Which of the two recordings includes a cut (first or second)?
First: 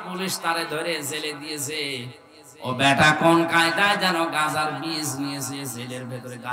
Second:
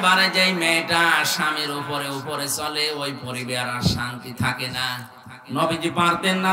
second